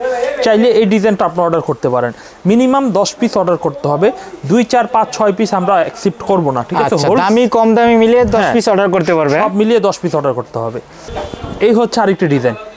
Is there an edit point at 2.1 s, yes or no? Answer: no